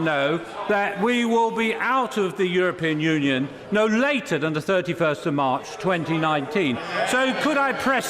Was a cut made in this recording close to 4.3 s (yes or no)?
no